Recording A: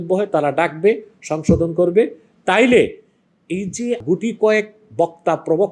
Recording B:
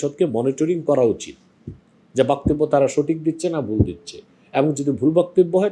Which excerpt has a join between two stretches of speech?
A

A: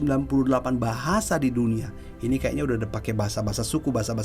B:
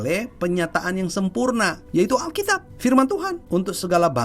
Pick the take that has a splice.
B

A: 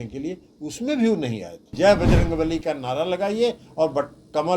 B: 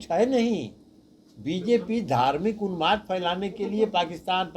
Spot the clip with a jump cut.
A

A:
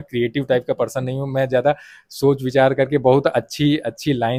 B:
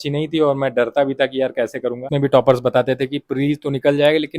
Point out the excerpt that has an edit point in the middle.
B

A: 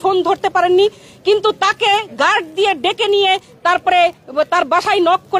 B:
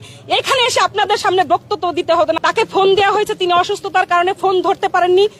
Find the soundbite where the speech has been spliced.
B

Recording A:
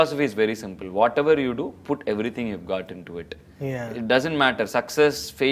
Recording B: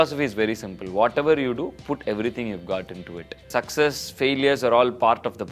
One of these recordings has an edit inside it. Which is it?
B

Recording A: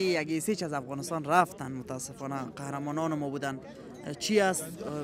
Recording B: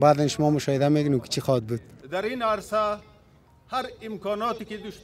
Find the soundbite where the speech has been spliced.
B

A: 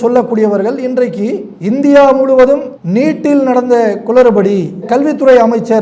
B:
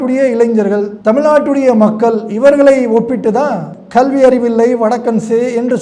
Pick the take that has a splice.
B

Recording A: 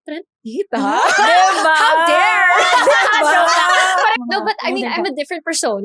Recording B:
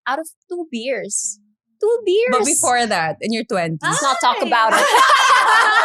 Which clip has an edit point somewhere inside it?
A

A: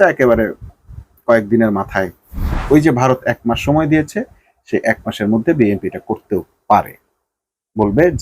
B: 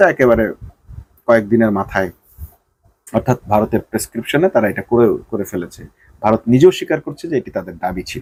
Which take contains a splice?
A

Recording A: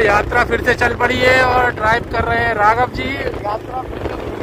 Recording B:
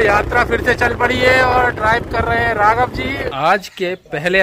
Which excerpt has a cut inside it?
B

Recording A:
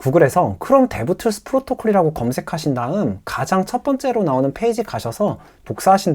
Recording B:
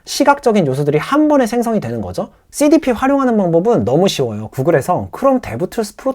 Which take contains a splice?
B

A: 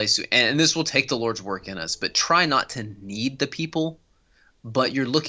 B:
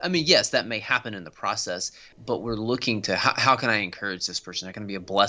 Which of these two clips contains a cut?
B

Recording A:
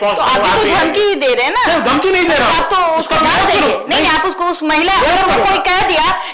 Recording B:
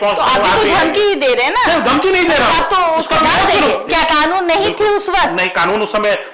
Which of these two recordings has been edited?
B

